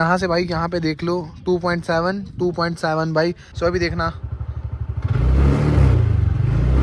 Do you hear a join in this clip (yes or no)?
yes